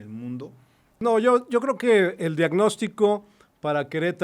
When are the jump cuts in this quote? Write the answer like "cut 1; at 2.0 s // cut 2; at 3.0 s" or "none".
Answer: cut 1; at 1.0 s

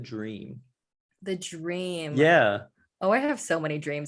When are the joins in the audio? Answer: none

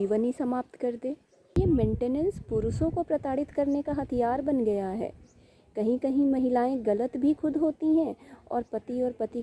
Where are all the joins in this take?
cut 1; at 1.6 s

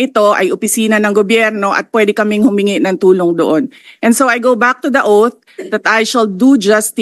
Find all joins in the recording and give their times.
none

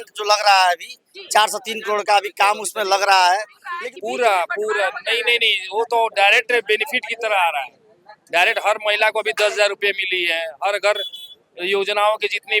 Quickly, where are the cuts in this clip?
cut 1; at 3.6 s

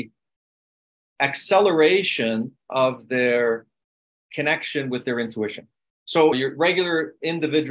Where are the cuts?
cut 1; at 6.3 s

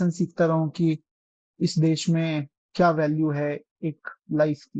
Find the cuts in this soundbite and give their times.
cut 1; at 2.6 s

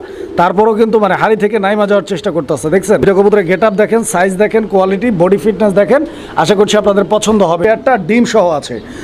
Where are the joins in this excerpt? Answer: cut 1; at 3.0 s // cut 2; at 7.6 s

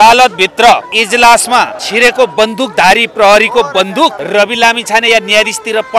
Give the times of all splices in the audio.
cut 1; at 0.9 s // cut 2; at 1.8 s // cut 3; at 3.1 s // cut 4; at 4.2 s

